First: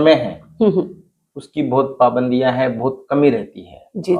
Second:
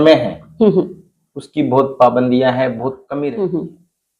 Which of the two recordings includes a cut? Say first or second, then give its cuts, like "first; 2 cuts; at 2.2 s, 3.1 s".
second; 1 cut; at 3.0 s